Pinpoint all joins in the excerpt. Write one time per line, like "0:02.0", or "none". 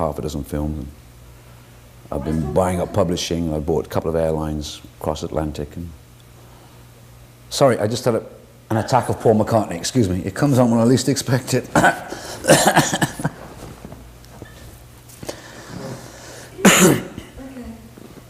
0:12.1